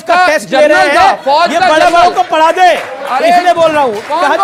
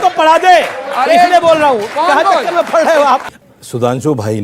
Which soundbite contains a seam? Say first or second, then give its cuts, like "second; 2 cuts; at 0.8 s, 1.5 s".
second; 1 cut; at 3.3 s